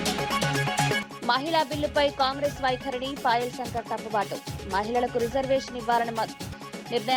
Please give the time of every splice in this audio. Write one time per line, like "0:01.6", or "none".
0:01.0